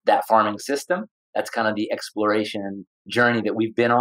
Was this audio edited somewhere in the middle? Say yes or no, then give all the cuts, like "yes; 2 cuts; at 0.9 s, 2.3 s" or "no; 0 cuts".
yes; 2 cuts; at 1.2 s, 3.0 s